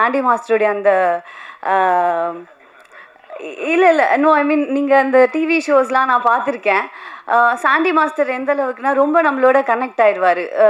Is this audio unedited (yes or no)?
yes